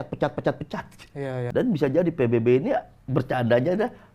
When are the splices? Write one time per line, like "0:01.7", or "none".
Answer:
0:01.4